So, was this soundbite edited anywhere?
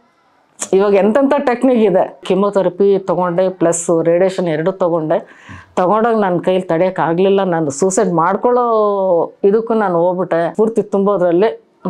yes; 2 cuts; at 2.2 s, 10.5 s

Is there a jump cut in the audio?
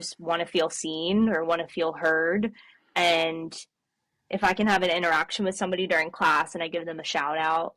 no; 0 cuts

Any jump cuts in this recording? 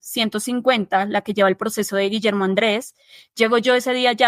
no; 0 cuts

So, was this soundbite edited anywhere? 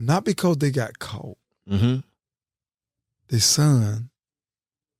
no; 0 cuts

